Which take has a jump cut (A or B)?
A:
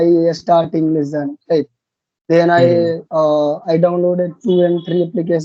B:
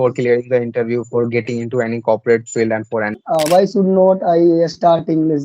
B